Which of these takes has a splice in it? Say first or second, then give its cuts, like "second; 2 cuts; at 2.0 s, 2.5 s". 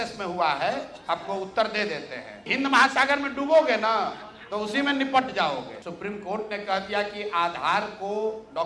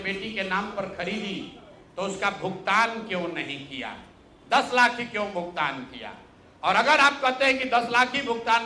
first; 2 cuts; at 2.4 s, 5.8 s